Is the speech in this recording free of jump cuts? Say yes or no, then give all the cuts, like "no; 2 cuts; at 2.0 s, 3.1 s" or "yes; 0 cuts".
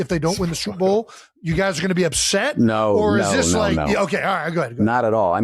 yes; 0 cuts